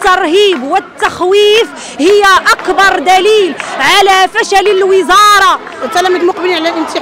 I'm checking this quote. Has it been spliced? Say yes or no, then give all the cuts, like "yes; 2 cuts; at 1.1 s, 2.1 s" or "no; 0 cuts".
yes; 1 cut; at 5.7 s